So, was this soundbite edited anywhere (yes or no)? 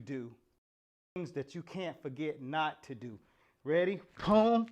yes